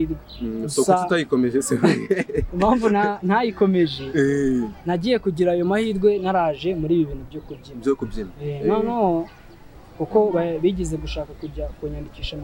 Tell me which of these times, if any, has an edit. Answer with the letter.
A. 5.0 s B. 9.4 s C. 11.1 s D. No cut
D